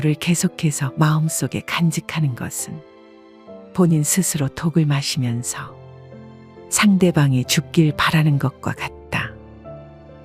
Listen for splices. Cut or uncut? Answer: cut